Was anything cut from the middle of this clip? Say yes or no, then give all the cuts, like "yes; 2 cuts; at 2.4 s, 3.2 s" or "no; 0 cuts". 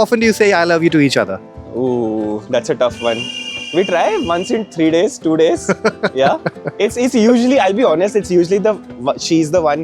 no; 0 cuts